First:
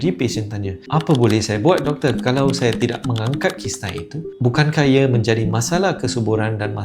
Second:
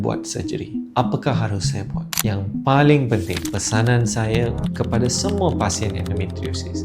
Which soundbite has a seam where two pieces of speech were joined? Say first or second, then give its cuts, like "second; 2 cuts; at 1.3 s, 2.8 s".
second; 1 cut; at 2.2 s